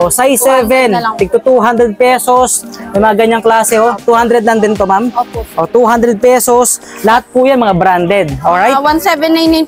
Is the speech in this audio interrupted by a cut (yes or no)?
no